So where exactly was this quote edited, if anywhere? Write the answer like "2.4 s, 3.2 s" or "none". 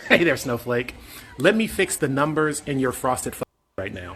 1.3 s